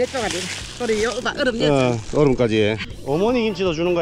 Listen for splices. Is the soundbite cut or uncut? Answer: cut